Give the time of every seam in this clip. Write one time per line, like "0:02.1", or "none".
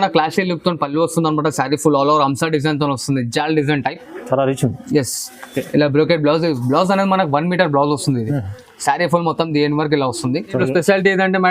0:10.5